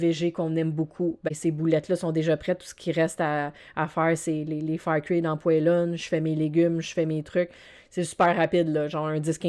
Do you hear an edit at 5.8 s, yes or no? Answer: no